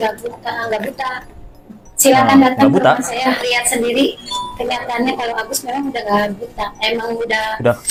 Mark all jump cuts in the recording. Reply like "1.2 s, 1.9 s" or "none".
none